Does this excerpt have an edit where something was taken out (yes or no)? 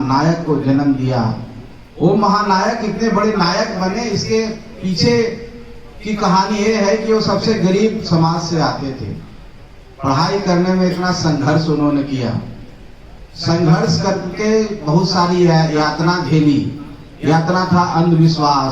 no